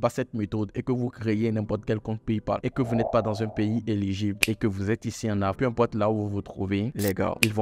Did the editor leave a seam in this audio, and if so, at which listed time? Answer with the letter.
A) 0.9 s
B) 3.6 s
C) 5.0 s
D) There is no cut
D